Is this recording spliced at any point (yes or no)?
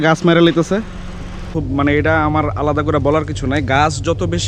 yes